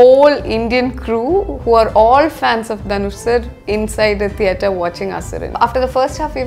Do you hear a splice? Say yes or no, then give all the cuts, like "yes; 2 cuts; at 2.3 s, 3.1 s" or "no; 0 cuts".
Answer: yes; 1 cut; at 5.5 s